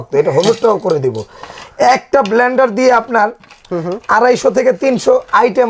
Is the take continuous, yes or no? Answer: yes